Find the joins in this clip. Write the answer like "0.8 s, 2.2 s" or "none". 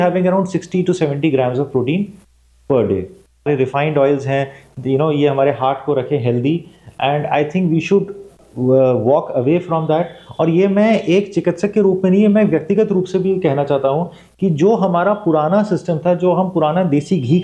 3.5 s